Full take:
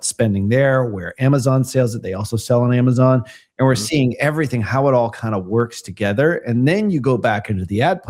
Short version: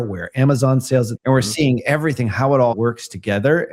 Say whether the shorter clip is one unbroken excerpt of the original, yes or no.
no